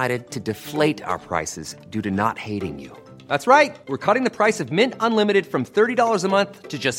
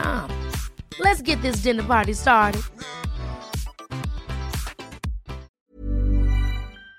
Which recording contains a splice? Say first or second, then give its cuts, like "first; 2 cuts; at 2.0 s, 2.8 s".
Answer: second; 1 cut; at 5.5 s